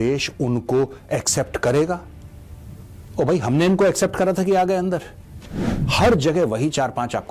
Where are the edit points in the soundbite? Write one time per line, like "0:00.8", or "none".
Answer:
0:05.8